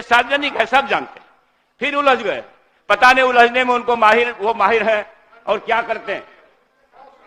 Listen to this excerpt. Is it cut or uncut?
uncut